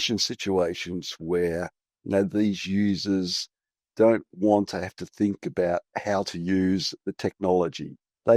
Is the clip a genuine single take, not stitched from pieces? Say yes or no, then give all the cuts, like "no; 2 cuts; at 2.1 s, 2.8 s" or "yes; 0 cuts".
no; 1 cut; at 7.0 s